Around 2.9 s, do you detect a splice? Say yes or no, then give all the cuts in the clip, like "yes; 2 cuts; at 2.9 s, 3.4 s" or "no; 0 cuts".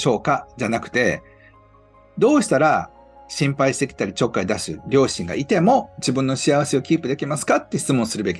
no; 0 cuts